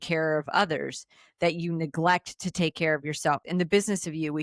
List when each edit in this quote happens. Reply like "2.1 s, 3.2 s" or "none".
3.4 s